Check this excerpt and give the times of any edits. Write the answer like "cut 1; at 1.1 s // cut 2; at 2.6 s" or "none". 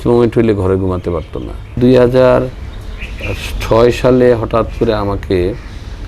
cut 1; at 1.8 s